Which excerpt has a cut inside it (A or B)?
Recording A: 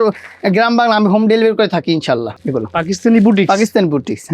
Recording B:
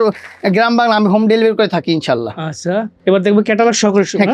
A